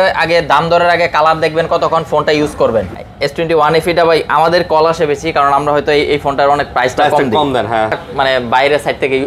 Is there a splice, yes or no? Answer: yes